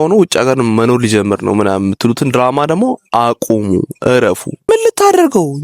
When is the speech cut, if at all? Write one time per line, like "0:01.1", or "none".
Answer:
0:04.7